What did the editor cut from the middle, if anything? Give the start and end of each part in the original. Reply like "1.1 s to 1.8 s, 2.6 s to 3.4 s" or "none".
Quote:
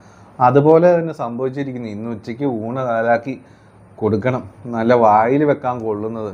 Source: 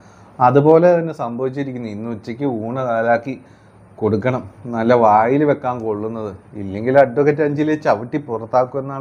none